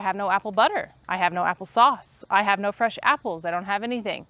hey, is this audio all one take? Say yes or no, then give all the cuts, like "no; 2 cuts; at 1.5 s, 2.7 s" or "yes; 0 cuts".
yes; 0 cuts